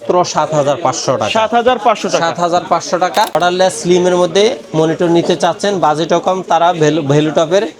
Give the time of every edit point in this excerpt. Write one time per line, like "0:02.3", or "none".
0:03.3